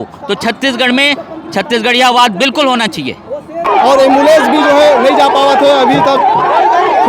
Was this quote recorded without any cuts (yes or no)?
no